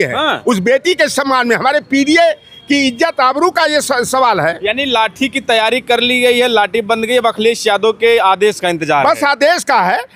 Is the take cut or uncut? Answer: uncut